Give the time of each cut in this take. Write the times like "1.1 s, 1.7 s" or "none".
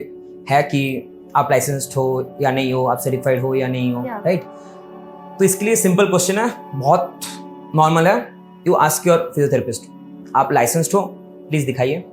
none